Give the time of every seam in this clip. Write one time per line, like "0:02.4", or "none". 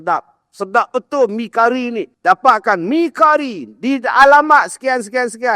0:02.1